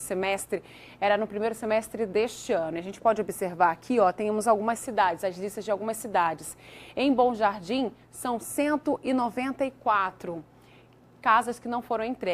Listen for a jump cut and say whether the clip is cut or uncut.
cut